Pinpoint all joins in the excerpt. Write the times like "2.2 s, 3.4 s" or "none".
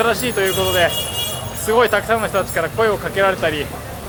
none